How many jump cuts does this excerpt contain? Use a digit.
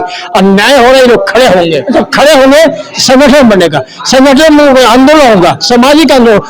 1